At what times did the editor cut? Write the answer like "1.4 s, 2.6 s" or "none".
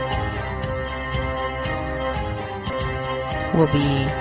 2.7 s